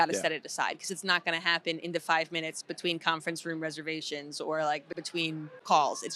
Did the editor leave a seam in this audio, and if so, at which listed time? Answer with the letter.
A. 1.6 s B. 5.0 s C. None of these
B